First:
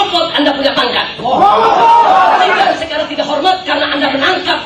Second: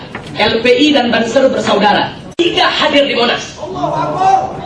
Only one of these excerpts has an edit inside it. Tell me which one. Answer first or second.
second